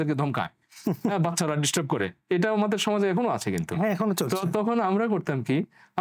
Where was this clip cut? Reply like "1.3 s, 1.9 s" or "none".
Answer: none